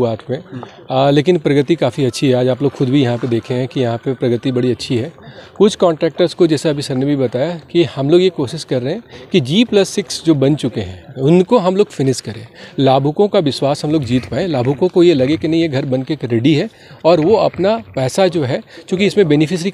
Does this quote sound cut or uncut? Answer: uncut